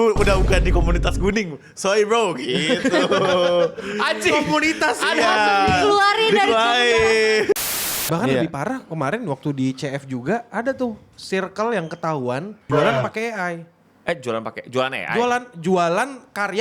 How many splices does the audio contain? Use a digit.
2